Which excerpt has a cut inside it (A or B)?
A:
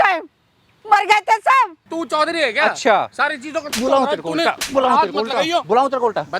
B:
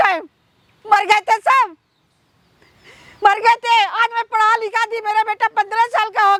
A